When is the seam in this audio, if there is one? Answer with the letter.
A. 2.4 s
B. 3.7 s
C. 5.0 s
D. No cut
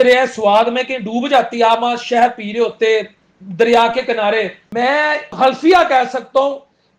C